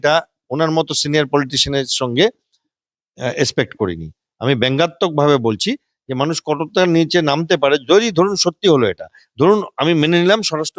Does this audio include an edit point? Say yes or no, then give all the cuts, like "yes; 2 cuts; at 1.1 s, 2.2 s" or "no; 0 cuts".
no; 0 cuts